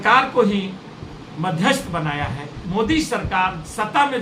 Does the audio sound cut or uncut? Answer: cut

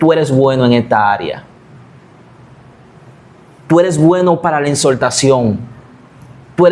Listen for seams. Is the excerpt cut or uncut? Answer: uncut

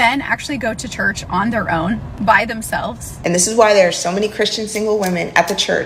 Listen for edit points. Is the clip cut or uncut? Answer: cut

